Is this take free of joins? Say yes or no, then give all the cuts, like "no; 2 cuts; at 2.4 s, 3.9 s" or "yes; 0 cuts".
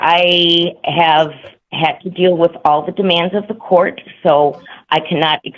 yes; 0 cuts